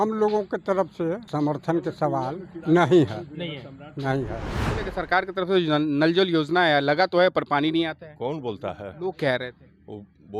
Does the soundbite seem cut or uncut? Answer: cut